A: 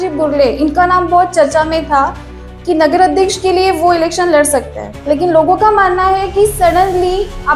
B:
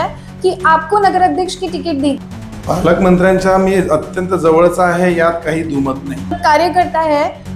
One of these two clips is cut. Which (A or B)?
B